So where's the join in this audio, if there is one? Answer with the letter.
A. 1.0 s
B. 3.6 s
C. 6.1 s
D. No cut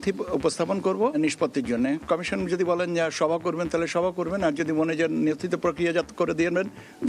D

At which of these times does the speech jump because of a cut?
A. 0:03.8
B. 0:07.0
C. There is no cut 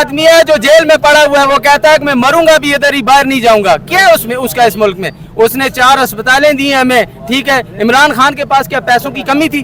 C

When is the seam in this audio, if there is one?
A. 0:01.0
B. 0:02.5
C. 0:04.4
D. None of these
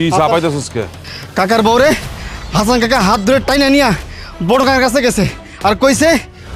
A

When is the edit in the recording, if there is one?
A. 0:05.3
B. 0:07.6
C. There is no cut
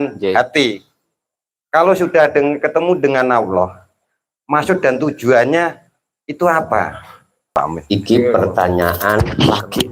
B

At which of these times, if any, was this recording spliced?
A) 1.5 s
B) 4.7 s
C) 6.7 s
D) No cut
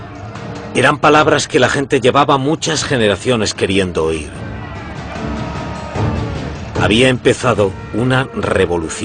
D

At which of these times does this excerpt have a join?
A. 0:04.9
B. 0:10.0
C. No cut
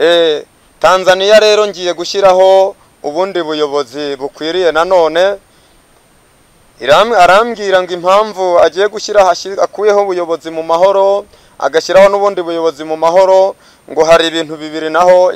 C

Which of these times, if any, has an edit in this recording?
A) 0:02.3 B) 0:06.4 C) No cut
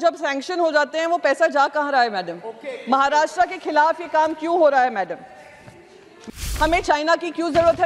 B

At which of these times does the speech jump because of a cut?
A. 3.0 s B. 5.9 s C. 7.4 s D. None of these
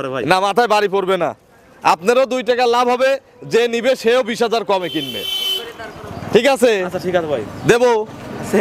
D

